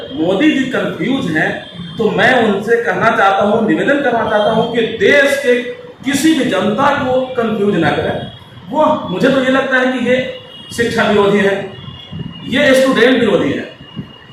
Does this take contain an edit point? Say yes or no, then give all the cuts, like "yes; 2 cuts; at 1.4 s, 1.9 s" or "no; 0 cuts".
no; 0 cuts